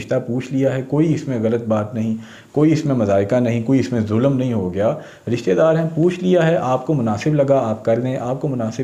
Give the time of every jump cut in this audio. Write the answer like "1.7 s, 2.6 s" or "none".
none